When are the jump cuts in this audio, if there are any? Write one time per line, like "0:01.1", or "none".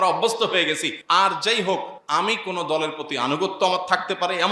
0:00.9
0:02.0

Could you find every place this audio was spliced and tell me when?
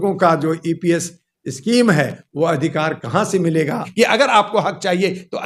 0:03.8

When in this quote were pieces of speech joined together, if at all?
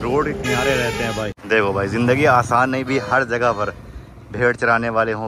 0:01.4

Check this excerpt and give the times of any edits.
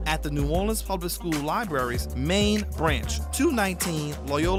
none

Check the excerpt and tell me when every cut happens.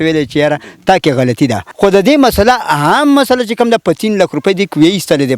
0:01.6

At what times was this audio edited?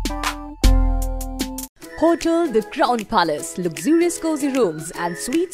none

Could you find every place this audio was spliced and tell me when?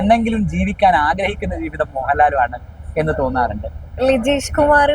0:03.7

